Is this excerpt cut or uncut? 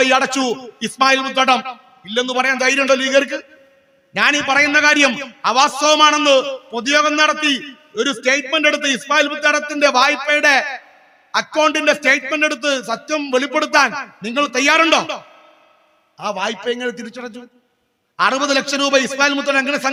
uncut